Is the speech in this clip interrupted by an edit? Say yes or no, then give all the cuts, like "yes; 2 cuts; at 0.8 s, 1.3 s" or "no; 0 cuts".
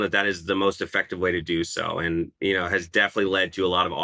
no; 0 cuts